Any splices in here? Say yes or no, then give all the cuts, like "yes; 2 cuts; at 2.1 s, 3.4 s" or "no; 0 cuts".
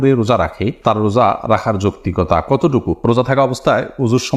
yes; 1 cut; at 2.9 s